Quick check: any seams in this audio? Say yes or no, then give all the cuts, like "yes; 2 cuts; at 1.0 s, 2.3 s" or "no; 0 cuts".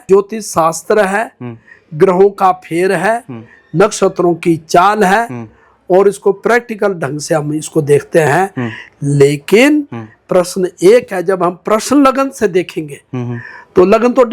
no; 0 cuts